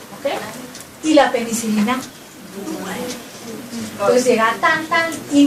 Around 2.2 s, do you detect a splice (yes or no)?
yes